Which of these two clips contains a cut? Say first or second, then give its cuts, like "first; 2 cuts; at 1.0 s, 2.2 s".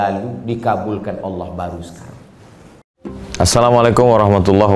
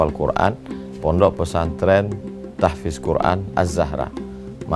first; 1 cut; at 2.9 s